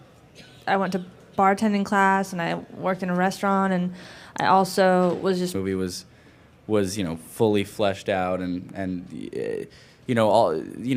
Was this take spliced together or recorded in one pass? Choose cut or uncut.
uncut